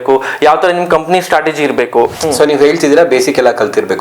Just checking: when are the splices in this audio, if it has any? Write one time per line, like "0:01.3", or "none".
0:02.1